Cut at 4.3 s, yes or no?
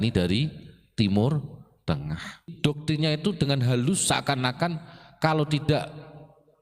no